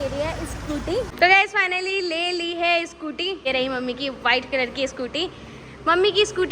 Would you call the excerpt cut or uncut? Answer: cut